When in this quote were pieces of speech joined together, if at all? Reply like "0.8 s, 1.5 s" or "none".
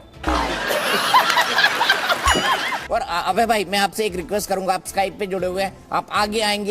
2.8 s

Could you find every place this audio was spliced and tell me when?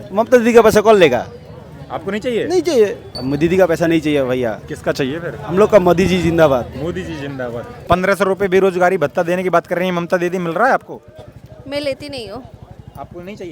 3.1 s, 7.8 s

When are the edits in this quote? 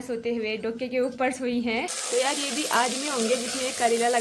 2.0 s

